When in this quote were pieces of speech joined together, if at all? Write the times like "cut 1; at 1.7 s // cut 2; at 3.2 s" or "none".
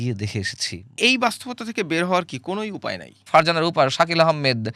cut 1; at 1.0 s // cut 2; at 3.3 s

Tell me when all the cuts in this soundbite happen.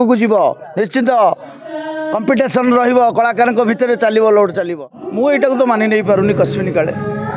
cut 1; at 4.7 s

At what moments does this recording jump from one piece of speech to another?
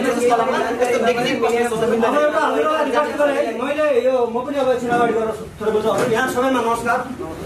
none

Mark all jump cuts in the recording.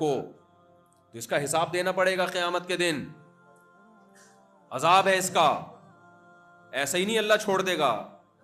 none

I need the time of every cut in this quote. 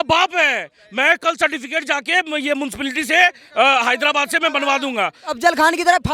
cut 1; at 5.2 s

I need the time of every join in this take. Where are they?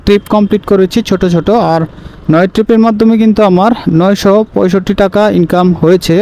none

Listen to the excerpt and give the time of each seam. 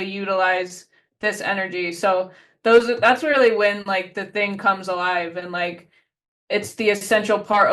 none

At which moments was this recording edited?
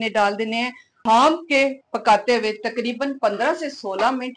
cut 1; at 0.9 s

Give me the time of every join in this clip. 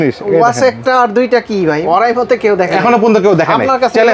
cut 1; at 1.8 s

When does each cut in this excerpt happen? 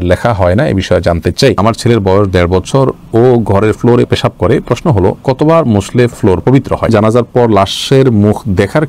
cut 1; at 1.6 s // cut 2; at 6.9 s

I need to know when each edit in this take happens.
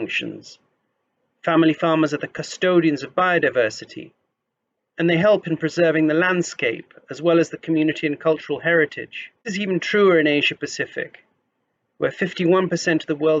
cut 1; at 9.5 s

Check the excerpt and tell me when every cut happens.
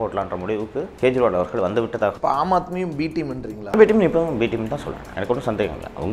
cut 1; at 0.9 s // cut 2; at 5.0 s

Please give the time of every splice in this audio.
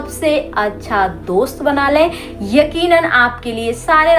none

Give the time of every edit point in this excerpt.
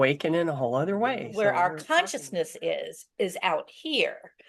cut 1; at 1.2 s

